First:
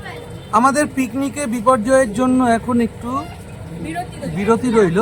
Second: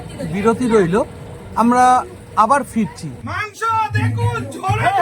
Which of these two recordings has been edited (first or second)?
second